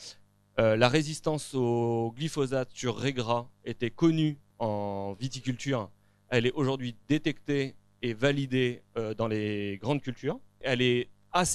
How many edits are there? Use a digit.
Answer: 2